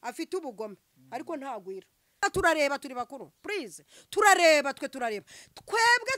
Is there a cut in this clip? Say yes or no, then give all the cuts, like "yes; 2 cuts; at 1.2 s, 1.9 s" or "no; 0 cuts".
yes; 1 cut; at 2.2 s